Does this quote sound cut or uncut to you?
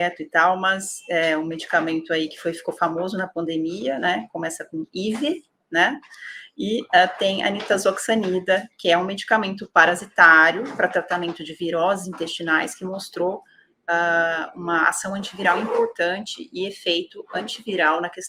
uncut